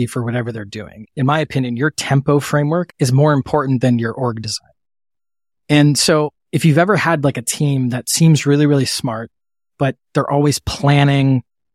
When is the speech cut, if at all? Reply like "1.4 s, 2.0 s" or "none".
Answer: 1.0 s, 2.9 s